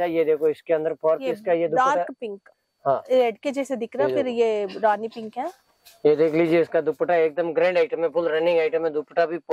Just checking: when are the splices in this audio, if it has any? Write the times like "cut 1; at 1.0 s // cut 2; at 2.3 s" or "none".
none